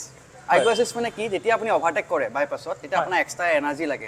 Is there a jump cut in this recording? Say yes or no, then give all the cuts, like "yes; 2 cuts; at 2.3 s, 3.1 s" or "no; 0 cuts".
no; 0 cuts